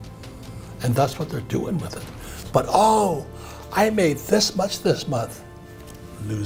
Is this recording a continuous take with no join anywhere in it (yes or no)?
yes